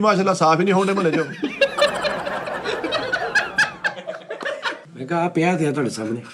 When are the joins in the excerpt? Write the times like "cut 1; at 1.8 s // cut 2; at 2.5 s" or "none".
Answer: cut 1; at 4.8 s